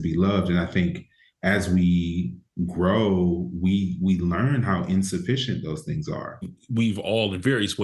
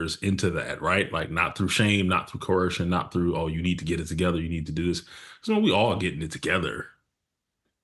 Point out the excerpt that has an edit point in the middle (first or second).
first